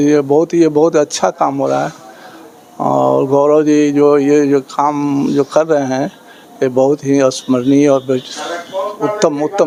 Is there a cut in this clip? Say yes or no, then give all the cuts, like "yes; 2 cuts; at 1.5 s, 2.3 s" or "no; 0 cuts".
no; 0 cuts